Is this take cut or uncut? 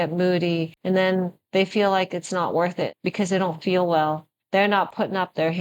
cut